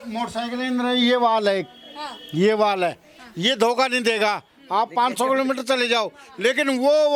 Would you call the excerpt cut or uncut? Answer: uncut